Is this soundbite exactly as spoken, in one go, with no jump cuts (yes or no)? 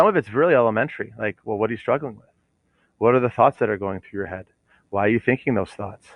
yes